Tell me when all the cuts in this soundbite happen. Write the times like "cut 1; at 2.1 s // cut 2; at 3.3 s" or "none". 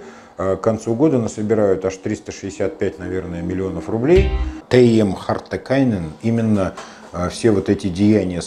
cut 1; at 4.6 s